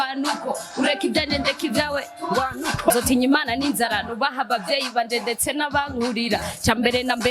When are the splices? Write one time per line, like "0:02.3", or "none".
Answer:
0:02.9